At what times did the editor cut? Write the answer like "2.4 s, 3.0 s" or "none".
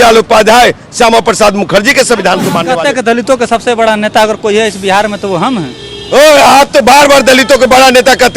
2.7 s